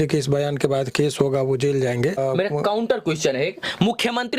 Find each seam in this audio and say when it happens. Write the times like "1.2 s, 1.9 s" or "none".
2.2 s